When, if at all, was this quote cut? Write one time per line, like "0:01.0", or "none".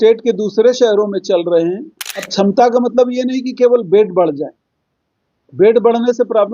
0:02.3

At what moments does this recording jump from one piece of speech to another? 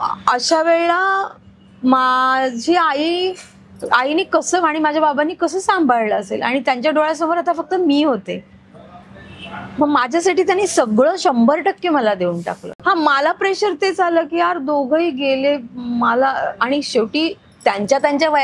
0:12.7

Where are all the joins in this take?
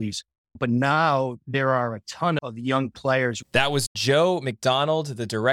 0:02.4
0:03.8

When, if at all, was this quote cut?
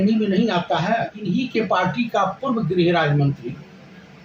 0:01.2

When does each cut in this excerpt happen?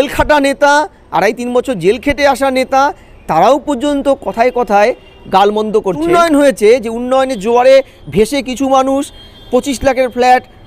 0:06.0

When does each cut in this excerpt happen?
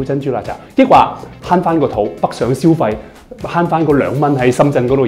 none

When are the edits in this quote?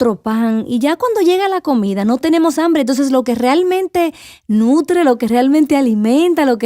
0:02.2

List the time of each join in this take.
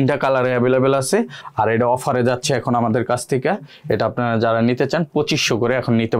none

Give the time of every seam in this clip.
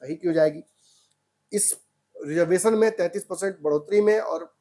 none

